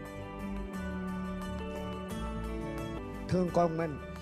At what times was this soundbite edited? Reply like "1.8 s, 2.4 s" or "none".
3.0 s

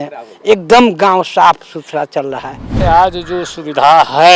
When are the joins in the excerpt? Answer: 2.7 s

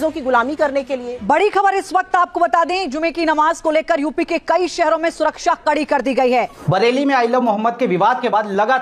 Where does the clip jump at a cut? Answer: 1.1 s, 6.6 s

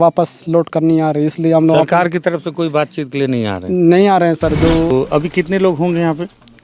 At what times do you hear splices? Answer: 4.9 s

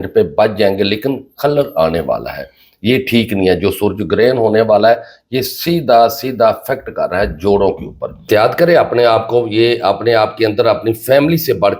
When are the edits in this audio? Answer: 8.3 s

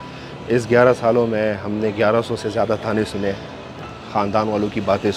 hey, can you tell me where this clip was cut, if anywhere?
none

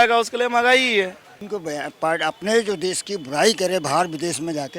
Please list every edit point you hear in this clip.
1.3 s

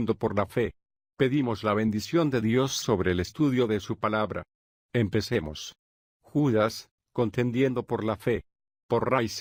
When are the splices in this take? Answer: none

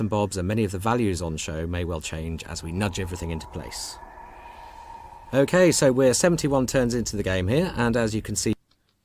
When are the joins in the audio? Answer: 2.7 s

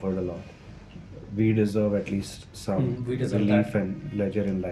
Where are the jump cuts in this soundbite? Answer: none

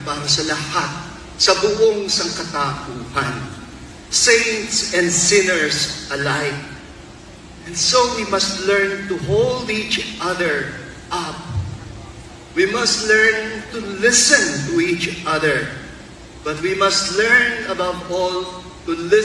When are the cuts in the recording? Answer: 3.6 s

